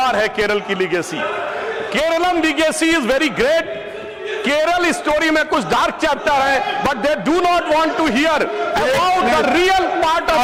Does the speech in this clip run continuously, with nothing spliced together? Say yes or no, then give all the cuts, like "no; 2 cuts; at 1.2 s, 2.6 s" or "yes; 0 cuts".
yes; 0 cuts